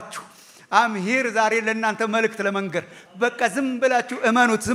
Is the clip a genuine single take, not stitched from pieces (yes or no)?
yes